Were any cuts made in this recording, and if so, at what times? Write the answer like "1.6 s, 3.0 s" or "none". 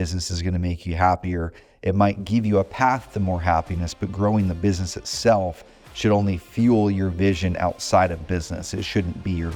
none